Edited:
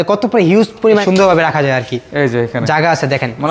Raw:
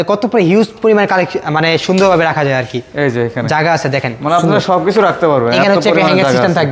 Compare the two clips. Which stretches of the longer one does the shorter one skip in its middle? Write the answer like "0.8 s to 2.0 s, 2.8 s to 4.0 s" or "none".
1.0 s to 1.9 s